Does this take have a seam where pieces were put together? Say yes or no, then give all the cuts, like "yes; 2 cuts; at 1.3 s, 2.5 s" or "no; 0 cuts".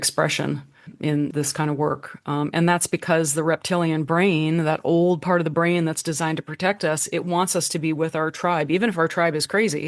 yes; 1 cut; at 1.2 s